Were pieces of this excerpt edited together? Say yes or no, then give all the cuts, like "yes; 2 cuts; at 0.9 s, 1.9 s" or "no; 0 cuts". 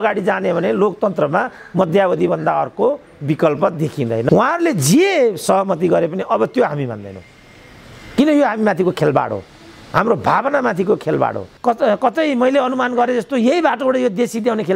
yes; 2 cuts; at 4.3 s, 11.5 s